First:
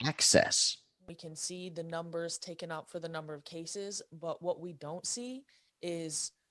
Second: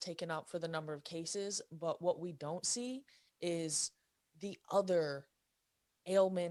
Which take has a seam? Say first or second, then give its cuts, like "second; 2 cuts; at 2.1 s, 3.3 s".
first; 1 cut; at 1.0 s